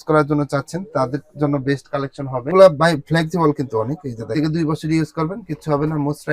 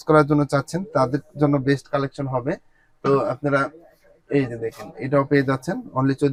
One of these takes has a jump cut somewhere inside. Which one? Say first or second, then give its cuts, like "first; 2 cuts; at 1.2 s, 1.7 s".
first; 1 cut; at 2.5 s